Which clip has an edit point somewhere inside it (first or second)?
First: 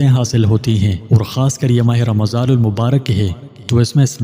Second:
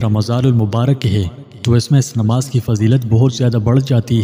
first